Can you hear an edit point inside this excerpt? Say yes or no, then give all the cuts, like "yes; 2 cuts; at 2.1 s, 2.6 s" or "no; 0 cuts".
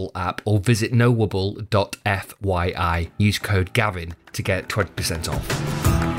yes; 1 cut; at 5.3 s